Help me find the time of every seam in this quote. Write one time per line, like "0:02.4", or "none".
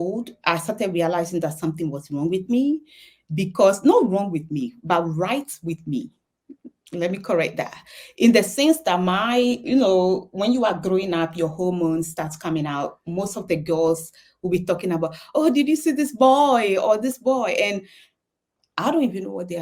none